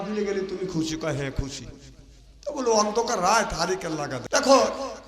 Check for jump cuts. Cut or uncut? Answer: cut